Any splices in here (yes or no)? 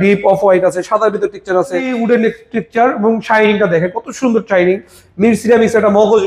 yes